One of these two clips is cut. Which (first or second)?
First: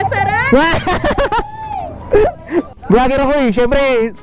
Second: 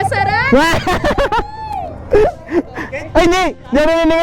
first